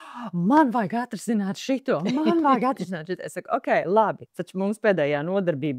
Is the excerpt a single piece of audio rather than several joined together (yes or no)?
no